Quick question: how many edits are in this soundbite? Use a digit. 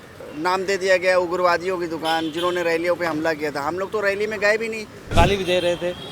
1